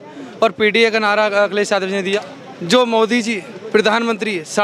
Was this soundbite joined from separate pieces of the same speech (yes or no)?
yes